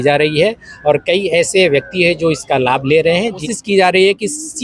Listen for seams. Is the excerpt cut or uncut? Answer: cut